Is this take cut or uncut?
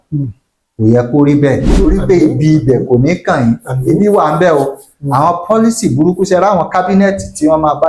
cut